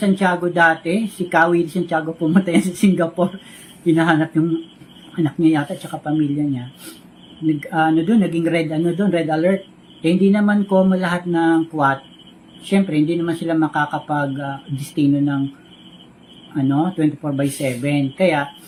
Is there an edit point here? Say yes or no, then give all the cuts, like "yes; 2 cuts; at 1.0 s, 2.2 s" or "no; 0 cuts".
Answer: no; 0 cuts